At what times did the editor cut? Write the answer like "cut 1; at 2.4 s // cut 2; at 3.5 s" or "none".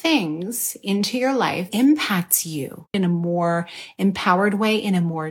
cut 1; at 1.7 s // cut 2; at 2.9 s